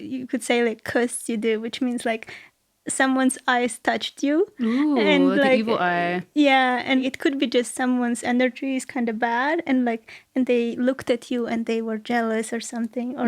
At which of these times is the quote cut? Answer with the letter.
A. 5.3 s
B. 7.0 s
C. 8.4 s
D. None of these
B